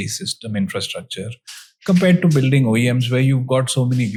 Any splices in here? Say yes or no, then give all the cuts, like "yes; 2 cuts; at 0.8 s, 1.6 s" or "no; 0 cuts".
no; 0 cuts